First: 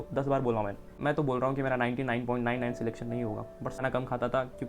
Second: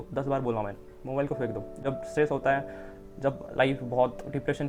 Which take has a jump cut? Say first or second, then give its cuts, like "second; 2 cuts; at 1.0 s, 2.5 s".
first; 2 cuts; at 0.9 s, 3.8 s